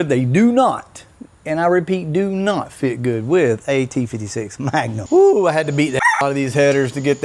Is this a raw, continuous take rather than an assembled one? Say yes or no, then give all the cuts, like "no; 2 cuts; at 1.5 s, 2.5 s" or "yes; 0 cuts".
no; 1 cut; at 5.0 s